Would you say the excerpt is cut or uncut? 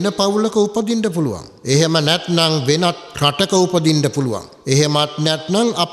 cut